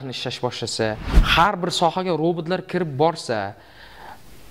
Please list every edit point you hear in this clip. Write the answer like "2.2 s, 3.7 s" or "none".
1.1 s